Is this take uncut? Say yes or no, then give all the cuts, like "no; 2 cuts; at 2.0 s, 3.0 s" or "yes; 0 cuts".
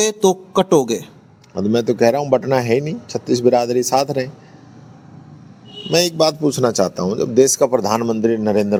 yes; 0 cuts